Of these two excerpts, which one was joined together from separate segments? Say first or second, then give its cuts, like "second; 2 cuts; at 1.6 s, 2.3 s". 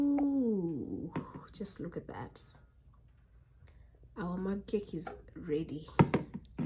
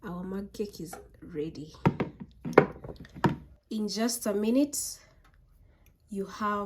second; 1 cut; at 3.5 s